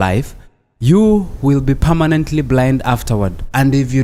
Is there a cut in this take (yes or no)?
no